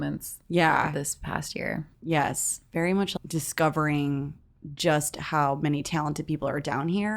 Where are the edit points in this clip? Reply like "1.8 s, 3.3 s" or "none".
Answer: 1.8 s, 3.1 s